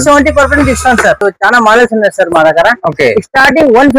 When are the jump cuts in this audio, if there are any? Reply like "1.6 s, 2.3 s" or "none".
1.2 s